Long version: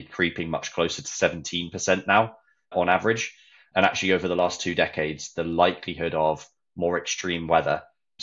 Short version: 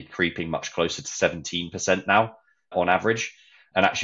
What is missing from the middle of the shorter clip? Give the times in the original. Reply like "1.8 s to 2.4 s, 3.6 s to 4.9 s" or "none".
none